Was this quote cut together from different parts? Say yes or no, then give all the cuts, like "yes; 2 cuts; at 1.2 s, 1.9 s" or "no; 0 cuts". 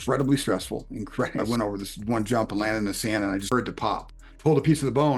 yes; 2 cuts; at 1.4 s, 3.9 s